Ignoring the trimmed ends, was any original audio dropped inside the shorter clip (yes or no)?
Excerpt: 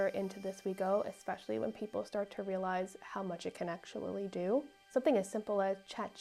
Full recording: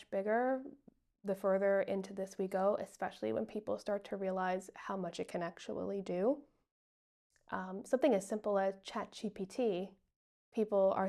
yes